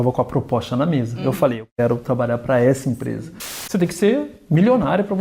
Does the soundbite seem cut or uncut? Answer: cut